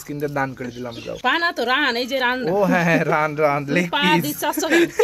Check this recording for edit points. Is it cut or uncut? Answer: cut